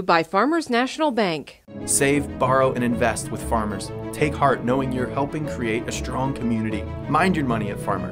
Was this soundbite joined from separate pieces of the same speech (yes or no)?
no